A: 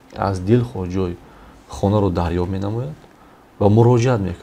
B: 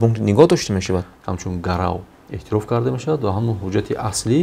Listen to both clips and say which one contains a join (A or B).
B